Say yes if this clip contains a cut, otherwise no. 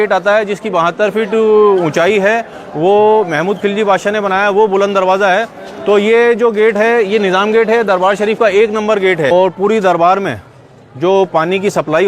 yes